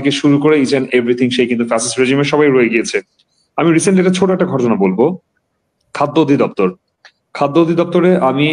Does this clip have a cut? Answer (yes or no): no